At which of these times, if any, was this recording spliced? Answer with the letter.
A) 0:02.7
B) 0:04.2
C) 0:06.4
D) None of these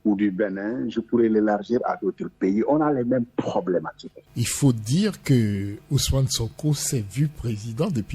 B